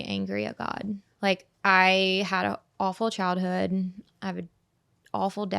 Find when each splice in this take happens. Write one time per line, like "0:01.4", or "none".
0:01.1